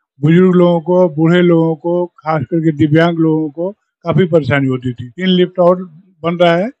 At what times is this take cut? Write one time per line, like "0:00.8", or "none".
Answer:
0:05.1